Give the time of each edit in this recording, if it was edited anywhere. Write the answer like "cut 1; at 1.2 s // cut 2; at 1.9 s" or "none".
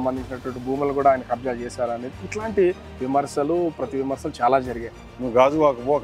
cut 1; at 5.0 s